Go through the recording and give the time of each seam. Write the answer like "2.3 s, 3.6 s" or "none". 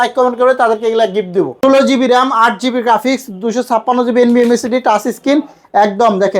1.5 s